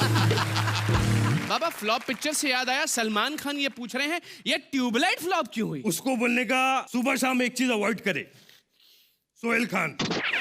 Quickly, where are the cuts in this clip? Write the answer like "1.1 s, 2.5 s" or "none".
1.4 s, 5.8 s, 6.9 s